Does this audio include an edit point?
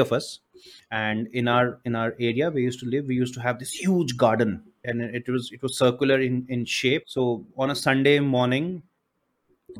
yes; 1 cut; at 7.1 s

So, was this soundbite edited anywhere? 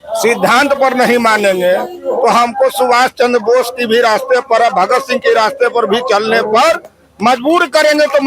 no; 0 cuts

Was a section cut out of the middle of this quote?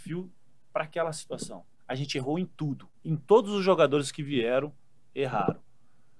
yes; 2 cuts; at 1.7 s, 2.9 s

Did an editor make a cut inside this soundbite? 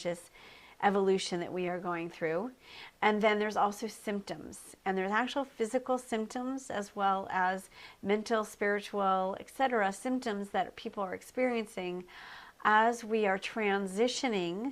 yes; 1 cut; at 9.5 s

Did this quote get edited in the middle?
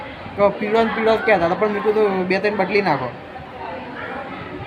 no; 0 cuts

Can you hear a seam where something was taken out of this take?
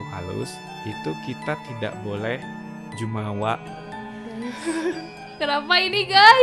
no; 0 cuts

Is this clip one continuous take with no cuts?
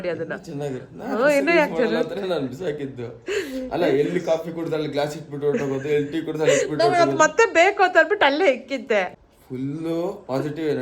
no; 1 cut; at 9.1 s

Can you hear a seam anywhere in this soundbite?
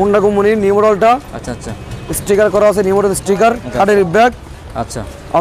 no; 0 cuts

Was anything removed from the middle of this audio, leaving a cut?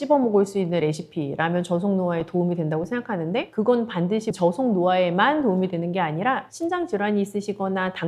no; 0 cuts

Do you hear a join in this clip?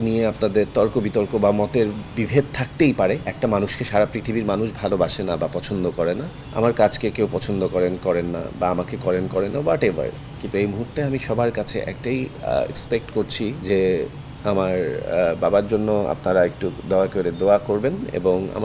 yes; 3 cuts; at 3.3 s, 6.4 s, 13.6 s

